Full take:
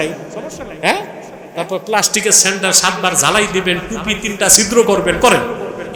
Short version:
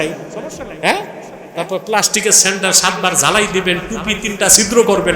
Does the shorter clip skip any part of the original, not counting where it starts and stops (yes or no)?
no